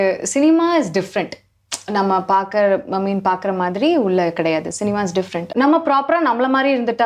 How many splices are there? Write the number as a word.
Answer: one